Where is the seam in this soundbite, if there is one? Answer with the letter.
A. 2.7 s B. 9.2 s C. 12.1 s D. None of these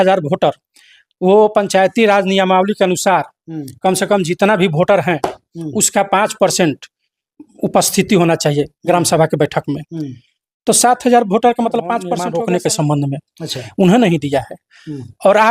C